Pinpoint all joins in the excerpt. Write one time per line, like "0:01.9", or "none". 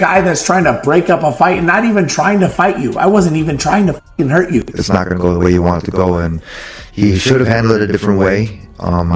0:04.7